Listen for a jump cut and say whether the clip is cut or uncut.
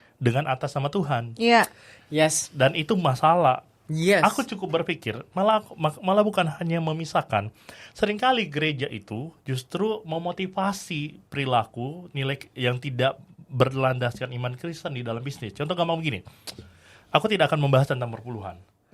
uncut